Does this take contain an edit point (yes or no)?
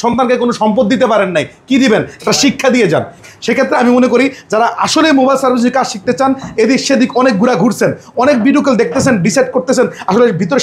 yes